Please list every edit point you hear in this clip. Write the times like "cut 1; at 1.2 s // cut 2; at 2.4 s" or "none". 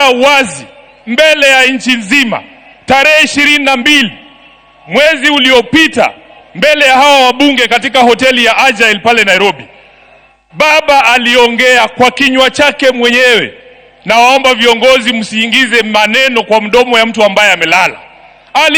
none